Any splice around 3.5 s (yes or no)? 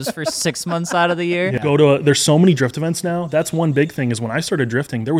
no